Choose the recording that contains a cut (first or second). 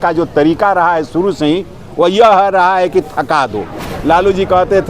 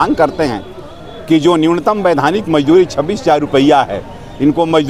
first